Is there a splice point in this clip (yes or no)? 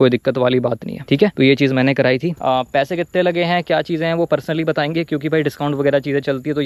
no